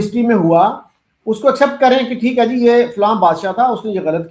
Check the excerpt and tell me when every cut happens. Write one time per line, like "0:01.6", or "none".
none